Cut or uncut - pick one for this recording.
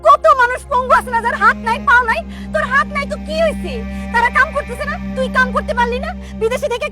uncut